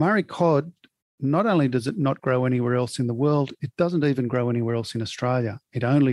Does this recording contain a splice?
no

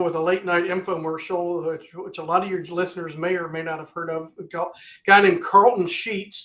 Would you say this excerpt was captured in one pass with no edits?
yes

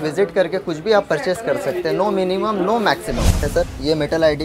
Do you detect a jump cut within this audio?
yes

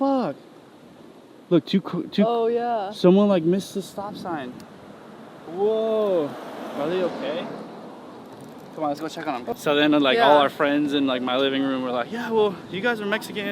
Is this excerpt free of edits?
no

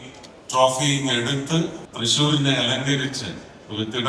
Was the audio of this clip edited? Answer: yes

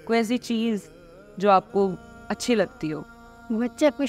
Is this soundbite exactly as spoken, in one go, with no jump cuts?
yes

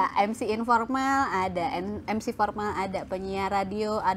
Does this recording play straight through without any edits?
yes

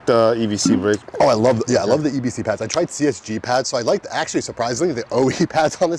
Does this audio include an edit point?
no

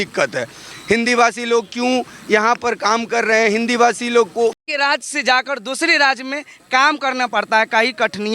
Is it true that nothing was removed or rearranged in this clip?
no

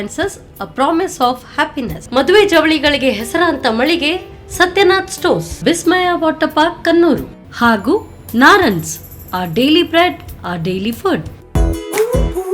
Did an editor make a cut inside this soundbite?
yes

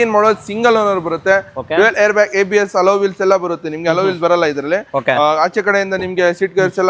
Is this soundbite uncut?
yes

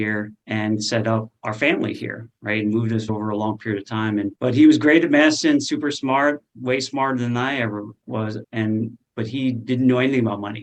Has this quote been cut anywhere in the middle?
no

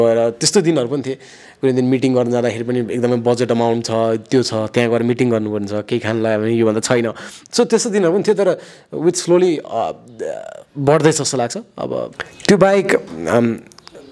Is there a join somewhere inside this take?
no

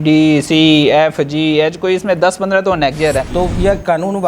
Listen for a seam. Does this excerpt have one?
yes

